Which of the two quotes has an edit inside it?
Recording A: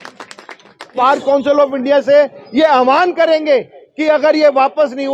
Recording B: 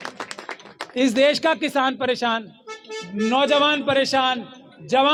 A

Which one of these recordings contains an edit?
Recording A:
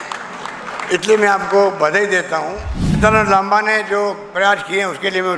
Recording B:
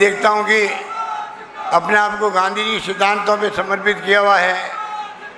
A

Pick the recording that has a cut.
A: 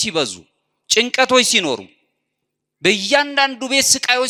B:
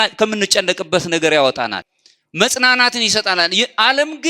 B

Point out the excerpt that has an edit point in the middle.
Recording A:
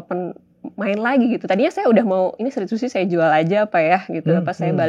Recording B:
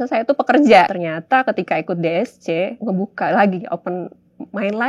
B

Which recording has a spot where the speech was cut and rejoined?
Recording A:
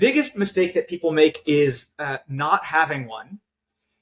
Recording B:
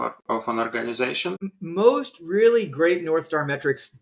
B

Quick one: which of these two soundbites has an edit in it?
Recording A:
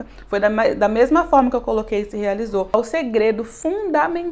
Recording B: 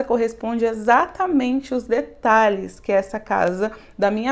A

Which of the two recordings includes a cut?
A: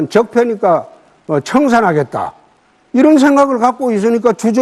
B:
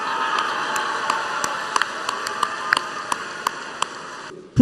B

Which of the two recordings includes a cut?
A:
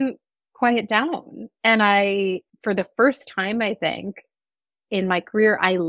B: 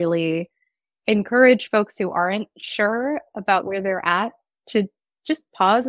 A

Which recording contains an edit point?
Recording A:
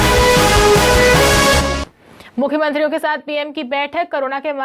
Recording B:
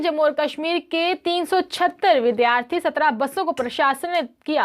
A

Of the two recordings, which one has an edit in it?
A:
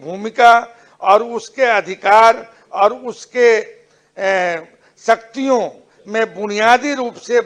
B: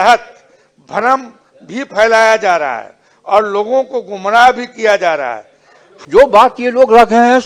B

